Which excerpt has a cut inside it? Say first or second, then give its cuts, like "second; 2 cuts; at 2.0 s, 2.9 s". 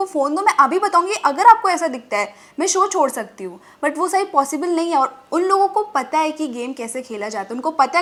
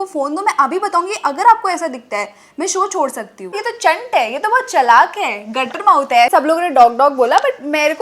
second; 2 cuts; at 3.6 s, 6.3 s